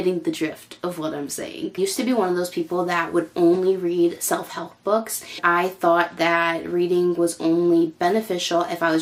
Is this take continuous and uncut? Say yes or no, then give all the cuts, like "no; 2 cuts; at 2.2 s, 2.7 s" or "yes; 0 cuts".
yes; 0 cuts